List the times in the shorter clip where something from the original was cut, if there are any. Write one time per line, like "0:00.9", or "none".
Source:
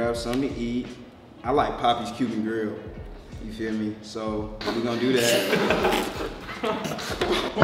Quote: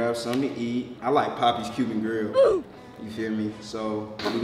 0:00.9